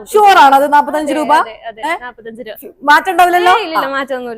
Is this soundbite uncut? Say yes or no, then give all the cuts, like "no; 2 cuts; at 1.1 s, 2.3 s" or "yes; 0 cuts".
yes; 0 cuts